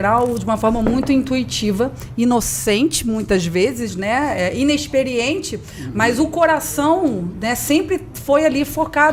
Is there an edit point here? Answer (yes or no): no